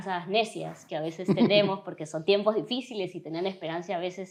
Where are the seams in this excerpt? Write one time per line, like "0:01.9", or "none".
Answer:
none